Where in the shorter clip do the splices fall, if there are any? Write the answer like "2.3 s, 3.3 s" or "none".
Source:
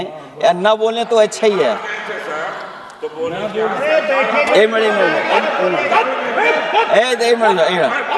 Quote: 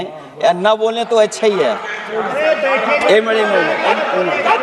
2.1 s